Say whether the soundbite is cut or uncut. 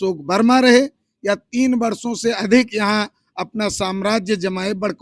uncut